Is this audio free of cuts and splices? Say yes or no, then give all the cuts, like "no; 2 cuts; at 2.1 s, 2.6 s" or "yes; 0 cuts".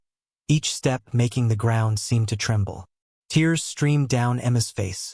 yes; 0 cuts